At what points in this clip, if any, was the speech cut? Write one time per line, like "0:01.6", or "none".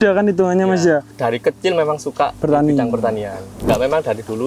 0:01.1
0:02.4
0:03.6